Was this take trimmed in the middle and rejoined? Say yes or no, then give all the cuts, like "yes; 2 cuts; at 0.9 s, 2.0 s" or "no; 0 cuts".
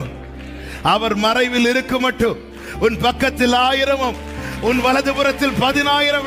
no; 0 cuts